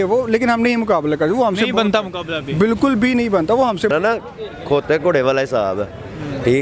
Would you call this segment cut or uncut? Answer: cut